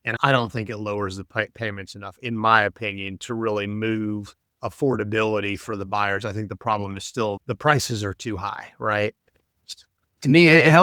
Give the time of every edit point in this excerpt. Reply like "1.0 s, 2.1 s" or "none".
none